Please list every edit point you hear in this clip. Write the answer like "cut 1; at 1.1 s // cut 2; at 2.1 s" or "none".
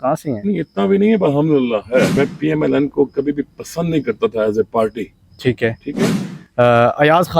cut 1; at 2.1 s // cut 2; at 6.1 s